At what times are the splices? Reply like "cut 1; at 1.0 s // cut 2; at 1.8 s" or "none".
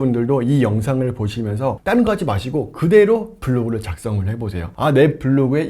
cut 1; at 1.8 s // cut 2; at 4.6 s